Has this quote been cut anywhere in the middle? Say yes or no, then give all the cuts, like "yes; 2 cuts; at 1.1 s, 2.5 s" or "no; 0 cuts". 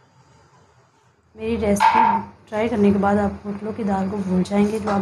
yes; 1 cut; at 1.4 s